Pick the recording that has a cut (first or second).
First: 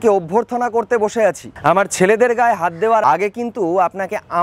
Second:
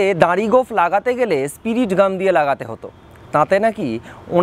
first